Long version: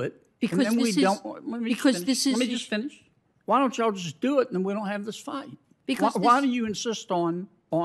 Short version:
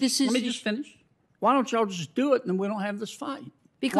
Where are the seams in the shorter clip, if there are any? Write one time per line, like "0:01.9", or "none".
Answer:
none

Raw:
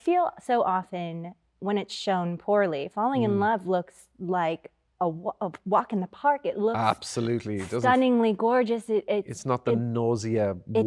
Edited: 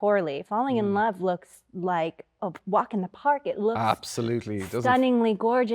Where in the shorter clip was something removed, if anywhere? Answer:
0:02.4

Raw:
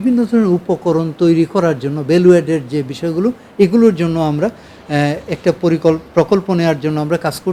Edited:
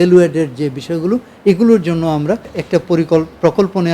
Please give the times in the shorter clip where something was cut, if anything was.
0:02.5

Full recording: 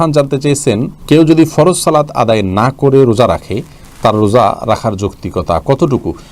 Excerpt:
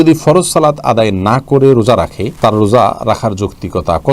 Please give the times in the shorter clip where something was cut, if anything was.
0:02.2

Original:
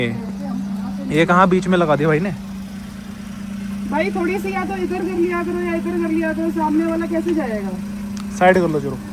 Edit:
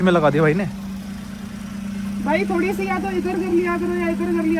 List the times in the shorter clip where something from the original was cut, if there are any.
none

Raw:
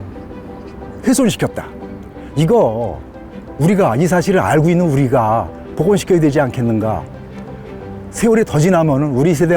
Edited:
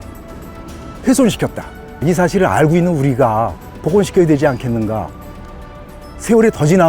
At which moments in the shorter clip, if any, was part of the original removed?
0:02.0

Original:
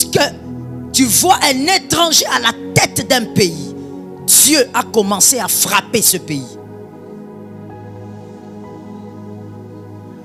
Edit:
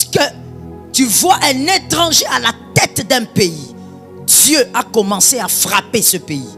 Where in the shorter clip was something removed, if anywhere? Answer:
none

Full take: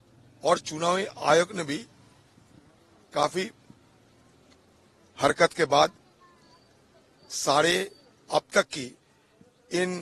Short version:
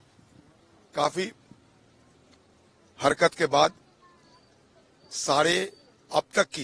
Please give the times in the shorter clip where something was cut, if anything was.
none

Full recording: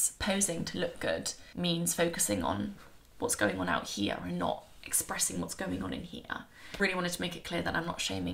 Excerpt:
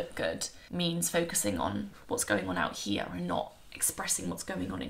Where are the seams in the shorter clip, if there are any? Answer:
0:01.9

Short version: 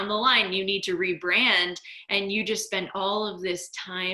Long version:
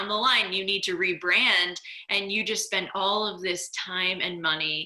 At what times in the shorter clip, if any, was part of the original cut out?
none

